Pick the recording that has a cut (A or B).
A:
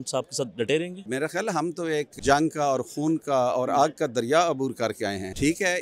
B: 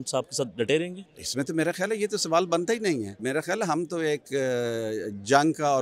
A